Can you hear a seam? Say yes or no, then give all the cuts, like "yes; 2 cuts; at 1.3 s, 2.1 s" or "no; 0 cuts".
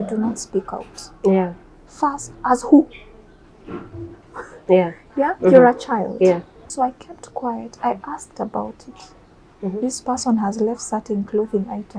yes; 1 cut; at 6.6 s